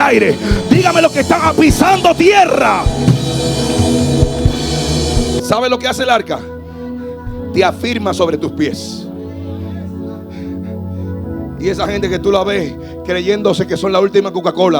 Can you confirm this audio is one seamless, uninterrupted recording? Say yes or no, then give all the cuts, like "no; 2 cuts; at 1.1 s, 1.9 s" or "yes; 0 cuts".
yes; 0 cuts